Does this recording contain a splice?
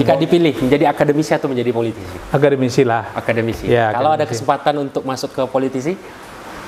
no; 0 cuts

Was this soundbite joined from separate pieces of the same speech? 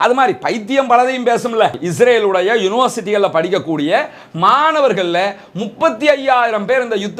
yes; 1 cut; at 1.8 s

